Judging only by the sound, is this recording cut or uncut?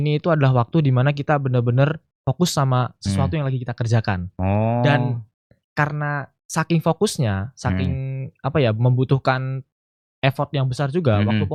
uncut